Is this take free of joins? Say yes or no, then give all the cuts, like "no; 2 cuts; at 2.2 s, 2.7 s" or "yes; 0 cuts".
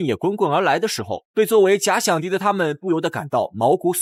yes; 0 cuts